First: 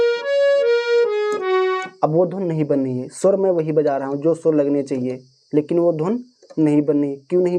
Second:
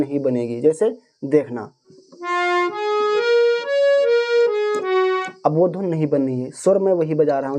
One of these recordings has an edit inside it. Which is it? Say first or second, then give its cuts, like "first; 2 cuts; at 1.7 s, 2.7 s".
second; 1 cut; at 1.8 s